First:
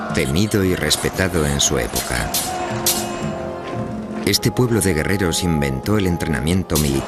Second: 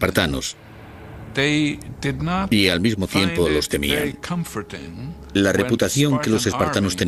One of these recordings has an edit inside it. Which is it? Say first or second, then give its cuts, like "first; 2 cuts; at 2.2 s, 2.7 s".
second; 1 cut; at 2.6 s